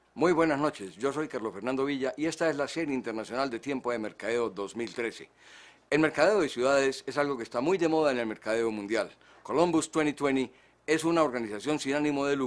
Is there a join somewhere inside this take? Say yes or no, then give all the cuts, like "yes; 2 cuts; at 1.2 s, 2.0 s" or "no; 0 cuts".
yes; 1 cut; at 7.0 s